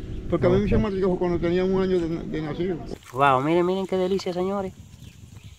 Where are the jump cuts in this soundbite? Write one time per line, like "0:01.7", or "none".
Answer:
0:02.9